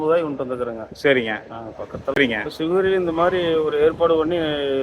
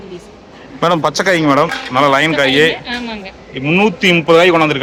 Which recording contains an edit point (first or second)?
first